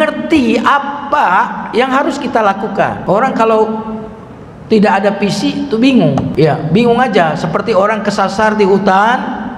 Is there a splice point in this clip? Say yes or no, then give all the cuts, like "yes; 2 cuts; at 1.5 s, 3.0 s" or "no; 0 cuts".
yes; 2 cuts; at 3.0 s, 6.3 s